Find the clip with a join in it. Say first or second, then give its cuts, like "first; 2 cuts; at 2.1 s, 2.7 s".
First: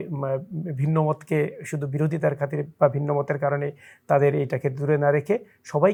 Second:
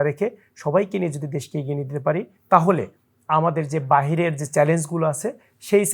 second; 1 cut; at 2.3 s